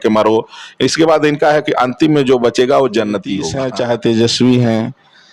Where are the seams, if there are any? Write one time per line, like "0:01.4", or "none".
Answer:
0:03.6

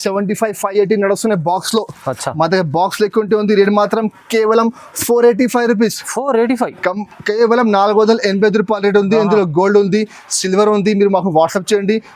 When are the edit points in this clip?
none

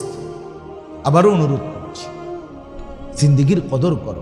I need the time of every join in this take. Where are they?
0:01.6
0:03.2

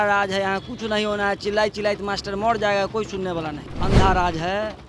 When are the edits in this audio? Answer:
0:03.7

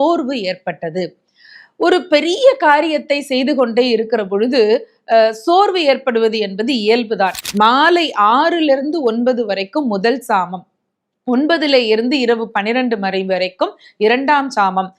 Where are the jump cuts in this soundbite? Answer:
0:07.4

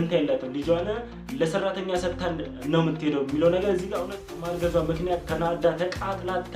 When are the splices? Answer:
0:04.4

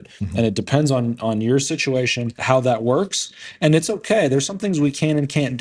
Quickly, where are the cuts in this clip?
0:02.4

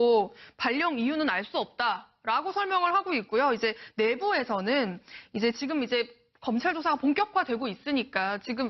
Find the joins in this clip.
0:06.3

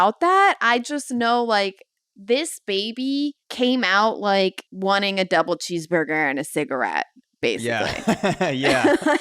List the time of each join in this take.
0:03.4
0:04.7

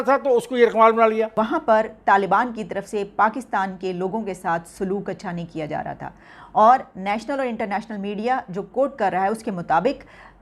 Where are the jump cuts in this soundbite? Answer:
0:01.3

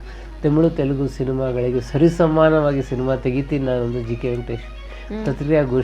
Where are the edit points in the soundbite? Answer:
none

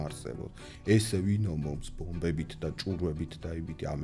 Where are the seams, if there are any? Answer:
none

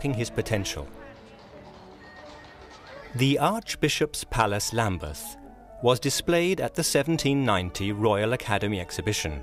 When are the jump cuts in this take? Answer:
none

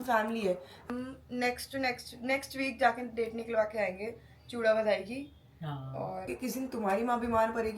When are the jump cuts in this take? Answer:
0:00.9
0:06.3

